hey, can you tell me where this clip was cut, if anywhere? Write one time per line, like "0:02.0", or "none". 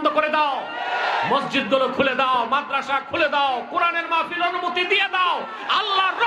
none